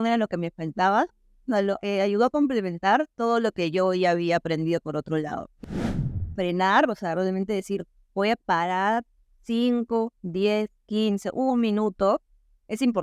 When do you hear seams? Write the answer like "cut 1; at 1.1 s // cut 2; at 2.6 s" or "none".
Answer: cut 1; at 6.0 s